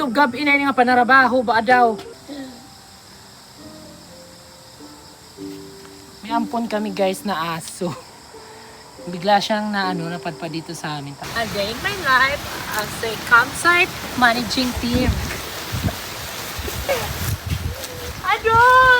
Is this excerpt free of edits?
no; 3 cuts; at 11.2 s, 14.0 s, 15.4 s

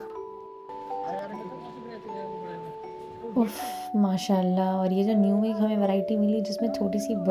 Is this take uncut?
no; 1 cut; at 1.2 s

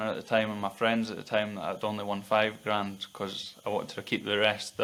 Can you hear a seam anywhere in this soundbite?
no; 0 cuts

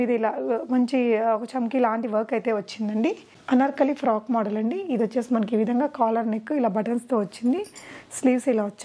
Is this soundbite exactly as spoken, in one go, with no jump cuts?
no; 1 cut; at 3.3 s

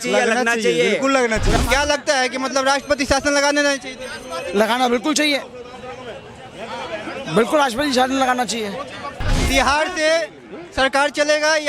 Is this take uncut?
no; 2 cuts; at 1.6 s, 9.3 s

